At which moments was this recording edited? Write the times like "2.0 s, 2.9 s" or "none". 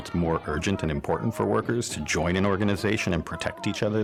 none